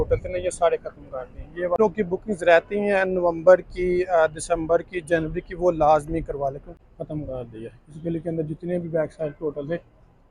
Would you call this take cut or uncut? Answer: cut